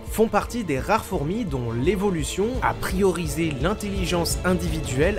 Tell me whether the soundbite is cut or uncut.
uncut